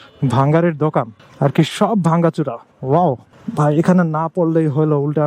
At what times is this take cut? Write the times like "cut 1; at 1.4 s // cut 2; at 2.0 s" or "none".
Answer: cut 1; at 1.2 s // cut 2; at 3.3 s